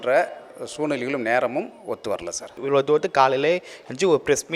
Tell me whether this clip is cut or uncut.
cut